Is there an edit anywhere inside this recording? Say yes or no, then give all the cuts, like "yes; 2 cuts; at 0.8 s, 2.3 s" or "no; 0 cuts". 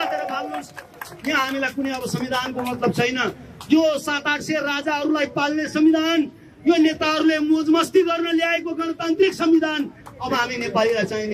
no; 0 cuts